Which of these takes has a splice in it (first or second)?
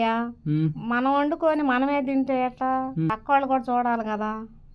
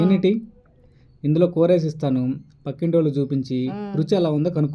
first